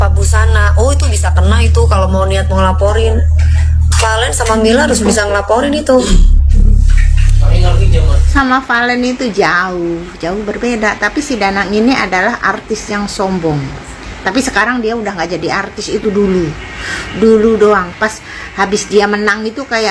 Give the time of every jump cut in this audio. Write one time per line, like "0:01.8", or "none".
0:08.2